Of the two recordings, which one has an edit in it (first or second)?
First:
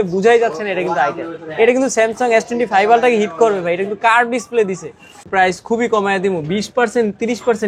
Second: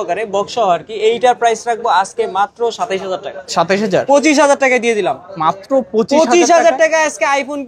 first